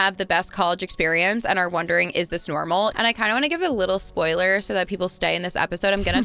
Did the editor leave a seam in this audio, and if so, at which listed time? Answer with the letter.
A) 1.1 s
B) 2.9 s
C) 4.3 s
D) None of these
B